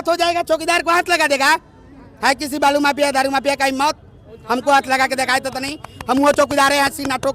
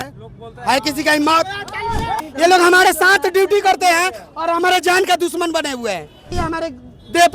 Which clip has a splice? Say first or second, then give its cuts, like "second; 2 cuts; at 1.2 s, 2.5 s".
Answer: second; 2 cuts; at 2.2 s, 6.3 s